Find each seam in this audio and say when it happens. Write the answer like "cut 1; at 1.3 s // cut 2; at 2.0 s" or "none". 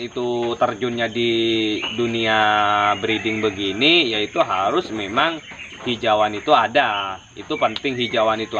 none

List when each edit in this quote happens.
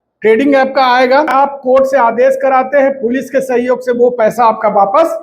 cut 1; at 1.3 s

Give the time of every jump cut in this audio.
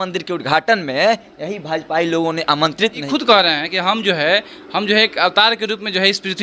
cut 1; at 3.0 s

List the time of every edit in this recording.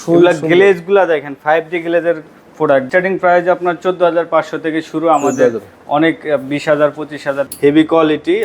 cut 1; at 2.9 s // cut 2; at 7.5 s

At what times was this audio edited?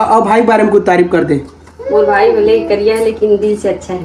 none

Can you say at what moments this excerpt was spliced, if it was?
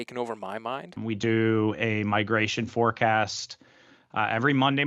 cut 1; at 1.0 s

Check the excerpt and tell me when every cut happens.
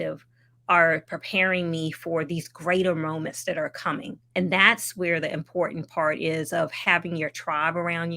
cut 1; at 4.3 s

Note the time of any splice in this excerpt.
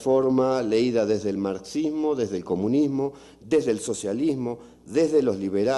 none

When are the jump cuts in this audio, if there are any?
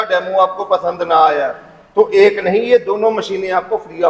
none

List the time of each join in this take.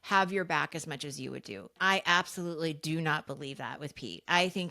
cut 1; at 1.8 s

